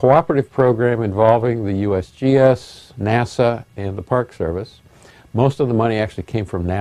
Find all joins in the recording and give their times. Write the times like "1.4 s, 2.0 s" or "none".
none